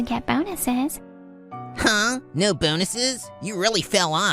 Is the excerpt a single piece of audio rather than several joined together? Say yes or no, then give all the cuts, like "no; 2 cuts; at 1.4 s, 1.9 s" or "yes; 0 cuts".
no; 1 cut; at 1.6 s